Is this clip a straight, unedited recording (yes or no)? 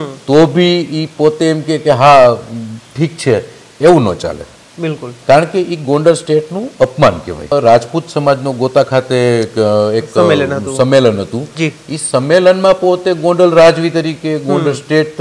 no